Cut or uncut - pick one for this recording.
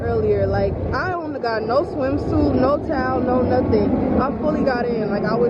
uncut